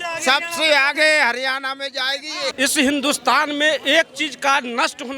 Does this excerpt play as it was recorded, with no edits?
no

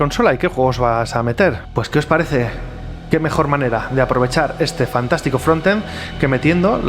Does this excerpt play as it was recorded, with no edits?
no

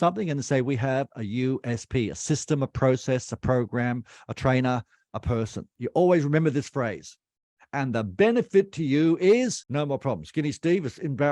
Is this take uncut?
no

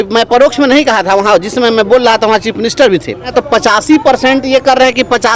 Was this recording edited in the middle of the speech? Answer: yes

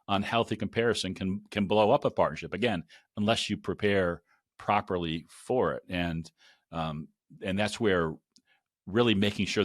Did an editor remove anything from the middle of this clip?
no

